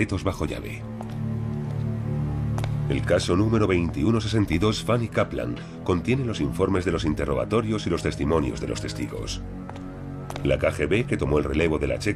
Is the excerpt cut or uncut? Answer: uncut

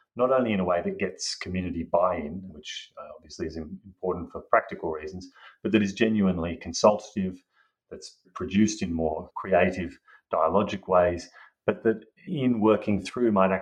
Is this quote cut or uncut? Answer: cut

